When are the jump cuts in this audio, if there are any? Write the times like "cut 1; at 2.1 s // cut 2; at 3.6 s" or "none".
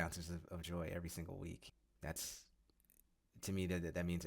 cut 1; at 1.7 s